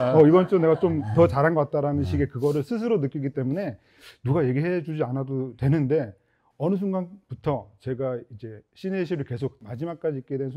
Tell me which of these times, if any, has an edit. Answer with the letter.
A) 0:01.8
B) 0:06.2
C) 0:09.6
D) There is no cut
C